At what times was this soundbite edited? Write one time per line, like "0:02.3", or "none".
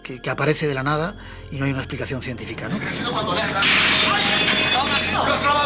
0:02.8

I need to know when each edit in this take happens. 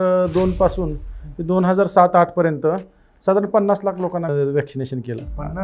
0:04.3

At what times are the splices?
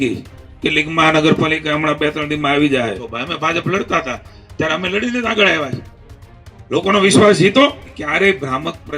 0:03.1
0:07.9

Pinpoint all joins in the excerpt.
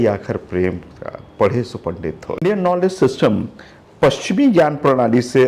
0:02.4

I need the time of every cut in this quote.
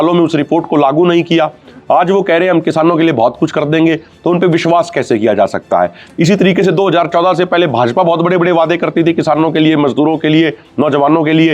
none

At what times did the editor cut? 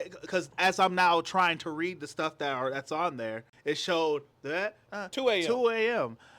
0:03.5
0:04.8

